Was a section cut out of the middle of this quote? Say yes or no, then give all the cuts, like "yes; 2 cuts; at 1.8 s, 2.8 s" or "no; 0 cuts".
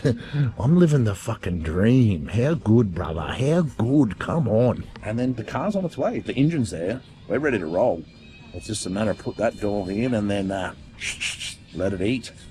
no; 0 cuts